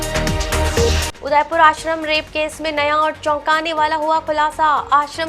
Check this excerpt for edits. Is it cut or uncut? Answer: cut